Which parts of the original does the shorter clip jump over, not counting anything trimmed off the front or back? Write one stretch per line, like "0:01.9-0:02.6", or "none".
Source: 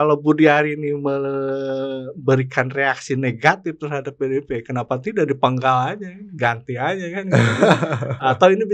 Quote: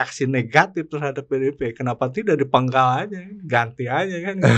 none